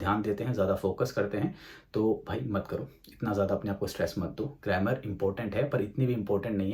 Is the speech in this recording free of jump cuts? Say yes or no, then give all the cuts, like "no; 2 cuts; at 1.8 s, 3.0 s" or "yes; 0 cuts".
yes; 0 cuts